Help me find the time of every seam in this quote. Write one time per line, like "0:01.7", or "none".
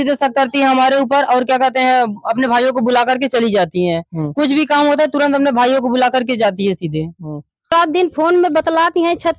0:07.7